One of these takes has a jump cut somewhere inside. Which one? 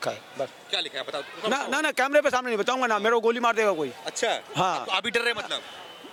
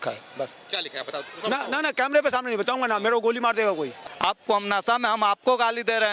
second; 1 cut; at 4.0 s

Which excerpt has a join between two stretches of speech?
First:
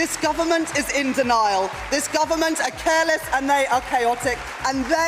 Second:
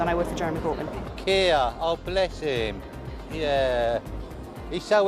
second; 1 cut; at 1.1 s

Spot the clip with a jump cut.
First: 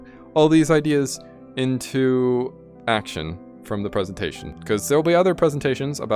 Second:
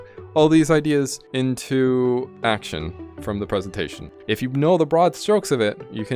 second; 3 cuts; at 1.2 s, 2.3 s, 4.2 s

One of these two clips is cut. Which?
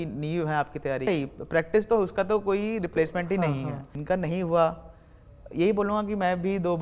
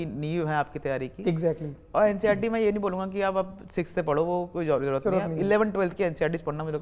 first; 2 cuts; at 1.1 s, 3.9 s

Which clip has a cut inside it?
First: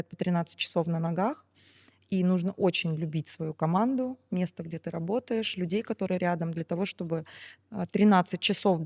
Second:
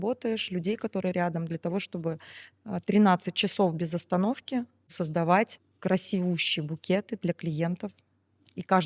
second; 2 cuts; at 4.9 s, 5.6 s

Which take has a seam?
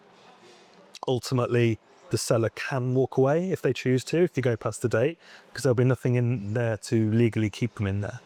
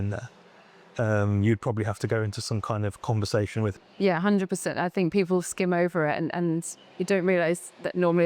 second; 1 cut; at 3.8 s

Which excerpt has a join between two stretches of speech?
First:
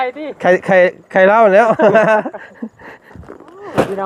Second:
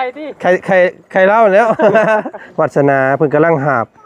second; 1 cut; at 2.4 s

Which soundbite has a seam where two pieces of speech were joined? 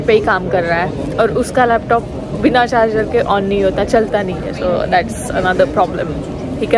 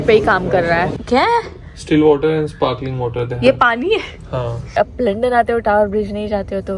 second; 2 cuts; at 1.0 s, 4.8 s

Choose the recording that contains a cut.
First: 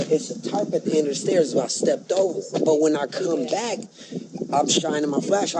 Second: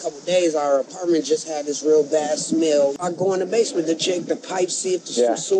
second; 1 cut; at 2.9 s

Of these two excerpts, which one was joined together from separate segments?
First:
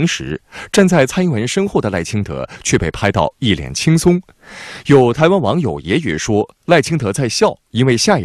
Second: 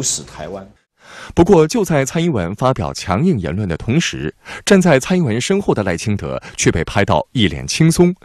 second; 1 cut; at 0.9 s

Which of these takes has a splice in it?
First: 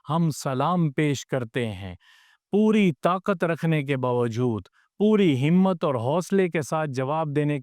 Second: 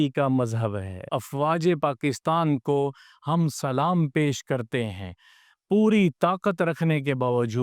second; 1 cut; at 1.1 s

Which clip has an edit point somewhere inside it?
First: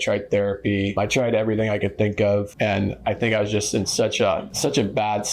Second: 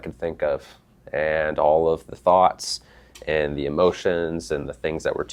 first; 3 cuts; at 1.0 s, 2.5 s, 4.5 s

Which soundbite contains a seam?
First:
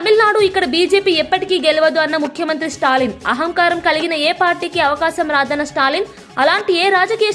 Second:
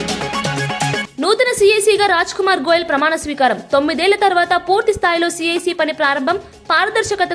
second; 1 cut; at 1.1 s

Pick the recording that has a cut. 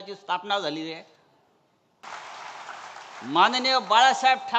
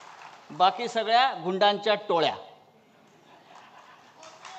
first; 1 cut; at 2.0 s

